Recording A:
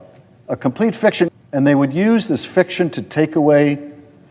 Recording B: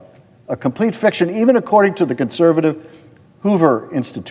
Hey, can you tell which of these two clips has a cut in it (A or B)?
A